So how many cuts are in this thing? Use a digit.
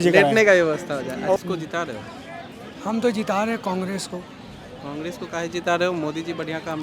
1